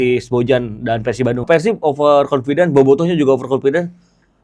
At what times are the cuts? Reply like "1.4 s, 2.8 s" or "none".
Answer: 1.4 s